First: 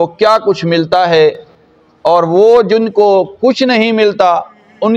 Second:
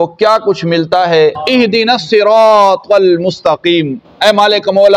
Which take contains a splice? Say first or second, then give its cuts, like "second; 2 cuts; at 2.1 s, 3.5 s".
second; 1 cut; at 1.4 s